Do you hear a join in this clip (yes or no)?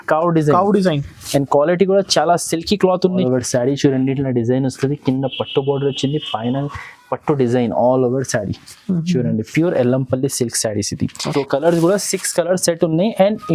yes